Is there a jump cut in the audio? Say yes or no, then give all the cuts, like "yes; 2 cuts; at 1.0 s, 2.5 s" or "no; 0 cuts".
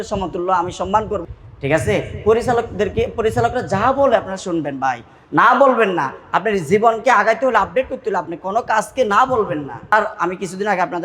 yes; 2 cuts; at 1.2 s, 9.9 s